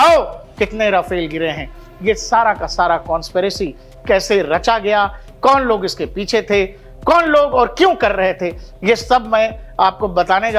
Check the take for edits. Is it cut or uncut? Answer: uncut